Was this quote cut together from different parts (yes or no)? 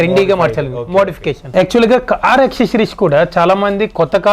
yes